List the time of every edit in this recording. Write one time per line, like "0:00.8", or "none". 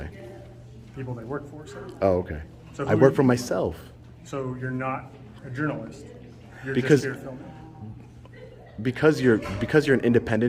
none